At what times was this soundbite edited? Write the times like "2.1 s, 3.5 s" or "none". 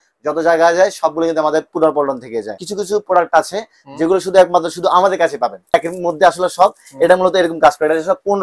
2.6 s, 5.7 s